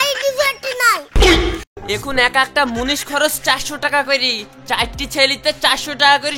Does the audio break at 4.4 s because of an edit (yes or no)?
no